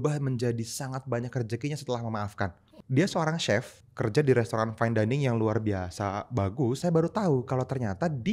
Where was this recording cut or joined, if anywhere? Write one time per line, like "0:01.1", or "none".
0:02.7
0:03.8
0:06.8